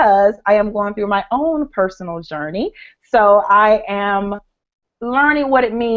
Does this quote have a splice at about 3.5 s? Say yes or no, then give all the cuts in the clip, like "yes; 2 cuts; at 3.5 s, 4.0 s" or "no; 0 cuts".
yes; 1 cut; at 3.5 s